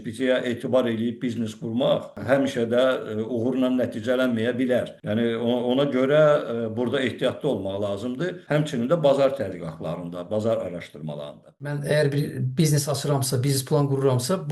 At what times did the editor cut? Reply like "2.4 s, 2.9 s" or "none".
2.2 s, 5.0 s, 8.4 s, 11.8 s